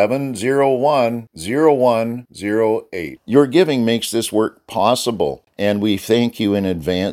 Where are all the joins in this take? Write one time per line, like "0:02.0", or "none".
0:05.4